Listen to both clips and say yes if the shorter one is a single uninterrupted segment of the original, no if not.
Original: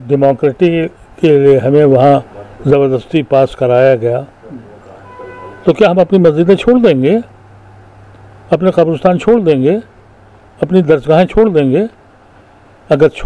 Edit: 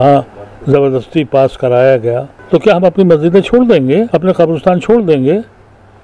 no